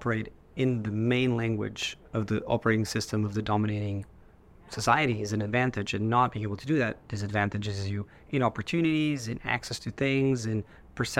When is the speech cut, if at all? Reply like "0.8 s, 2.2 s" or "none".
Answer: none